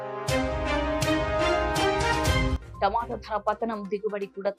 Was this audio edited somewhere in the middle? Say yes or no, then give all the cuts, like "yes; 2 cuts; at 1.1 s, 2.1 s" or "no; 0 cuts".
no; 0 cuts